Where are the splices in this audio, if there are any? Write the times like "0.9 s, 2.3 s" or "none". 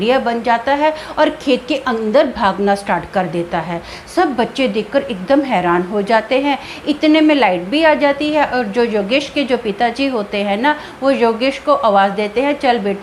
none